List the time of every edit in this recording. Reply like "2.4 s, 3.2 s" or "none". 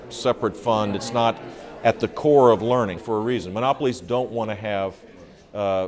3.0 s